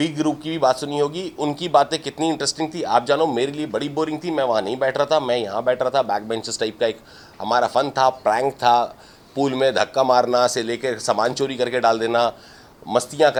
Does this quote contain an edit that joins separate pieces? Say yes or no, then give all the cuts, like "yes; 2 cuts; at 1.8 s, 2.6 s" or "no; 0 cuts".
no; 0 cuts